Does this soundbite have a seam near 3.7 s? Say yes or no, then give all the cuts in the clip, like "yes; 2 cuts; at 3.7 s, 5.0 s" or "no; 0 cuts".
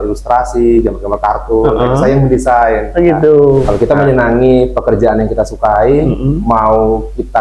yes; 1 cut; at 3.7 s